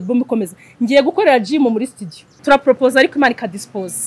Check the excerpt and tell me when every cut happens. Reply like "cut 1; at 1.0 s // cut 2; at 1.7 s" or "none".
cut 1; at 2.3 s